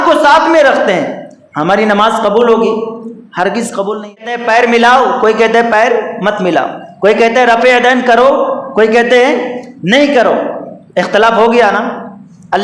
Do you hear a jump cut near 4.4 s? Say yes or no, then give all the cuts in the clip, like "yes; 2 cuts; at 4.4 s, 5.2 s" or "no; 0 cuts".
yes; 1 cut; at 4.4 s